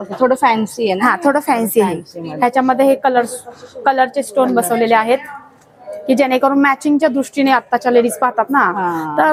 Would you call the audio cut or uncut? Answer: uncut